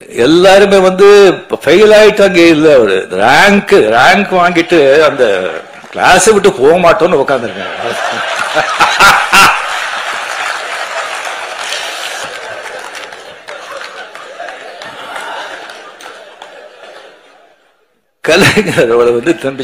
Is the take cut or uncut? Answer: uncut